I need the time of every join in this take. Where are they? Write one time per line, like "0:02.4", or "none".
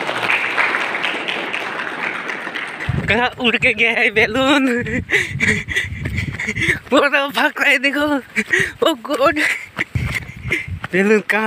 0:02.8
0:10.0